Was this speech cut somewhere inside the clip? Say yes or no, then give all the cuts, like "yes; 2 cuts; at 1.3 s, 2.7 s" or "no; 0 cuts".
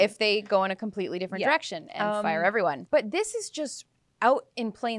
yes; 1 cut; at 2.8 s